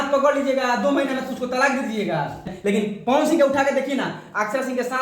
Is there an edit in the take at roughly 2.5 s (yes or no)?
yes